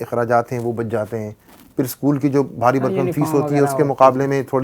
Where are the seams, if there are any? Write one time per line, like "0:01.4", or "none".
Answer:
none